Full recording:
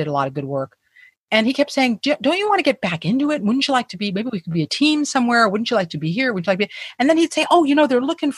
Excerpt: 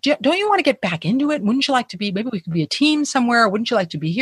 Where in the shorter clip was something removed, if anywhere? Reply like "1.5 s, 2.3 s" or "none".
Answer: none